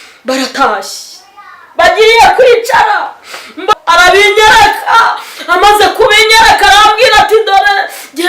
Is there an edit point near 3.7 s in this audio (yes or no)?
yes